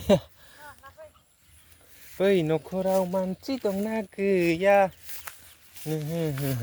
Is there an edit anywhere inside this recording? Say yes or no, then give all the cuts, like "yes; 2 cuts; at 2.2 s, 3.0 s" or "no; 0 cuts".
no; 0 cuts